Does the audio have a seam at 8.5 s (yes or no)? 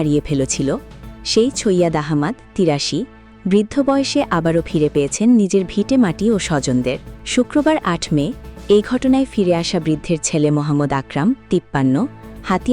no